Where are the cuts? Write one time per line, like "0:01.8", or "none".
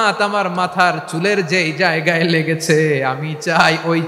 none

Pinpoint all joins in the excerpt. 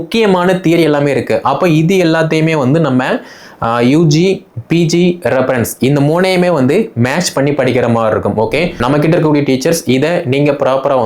0:08.8

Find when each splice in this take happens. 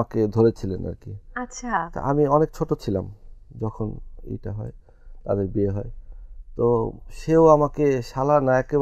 none

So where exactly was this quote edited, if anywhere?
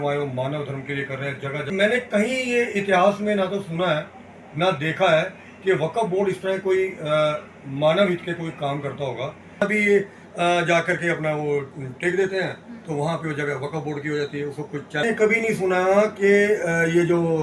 0:01.7
0:09.6
0:15.0

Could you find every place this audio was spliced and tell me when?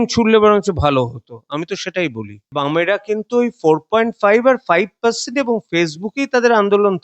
0:02.5

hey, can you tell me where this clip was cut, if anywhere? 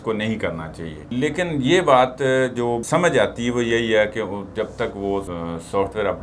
0:01.0
0:02.8
0:05.3

